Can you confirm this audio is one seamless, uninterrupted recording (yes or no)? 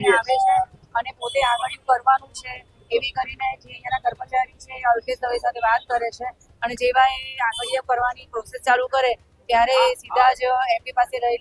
yes